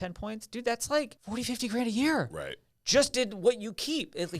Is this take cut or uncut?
cut